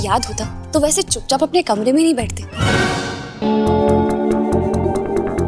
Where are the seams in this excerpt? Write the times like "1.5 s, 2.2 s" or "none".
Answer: 2.4 s